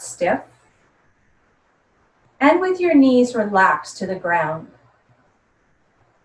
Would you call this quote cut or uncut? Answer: uncut